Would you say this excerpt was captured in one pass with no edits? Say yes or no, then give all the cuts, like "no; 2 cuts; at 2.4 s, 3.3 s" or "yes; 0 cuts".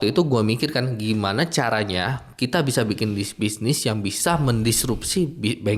yes; 0 cuts